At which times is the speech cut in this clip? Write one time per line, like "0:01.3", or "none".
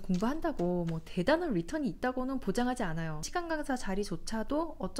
0:03.3